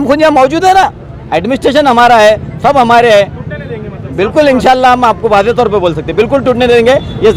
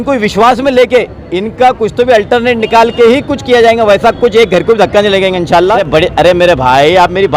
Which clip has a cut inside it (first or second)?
second